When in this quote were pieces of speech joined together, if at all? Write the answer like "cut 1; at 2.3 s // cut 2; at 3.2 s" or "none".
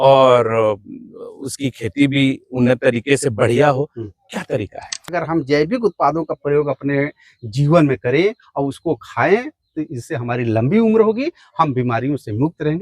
cut 1; at 5.1 s